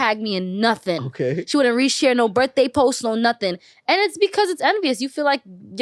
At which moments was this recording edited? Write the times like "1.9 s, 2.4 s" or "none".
none